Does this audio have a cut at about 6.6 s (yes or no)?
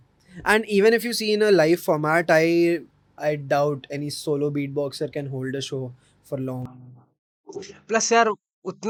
no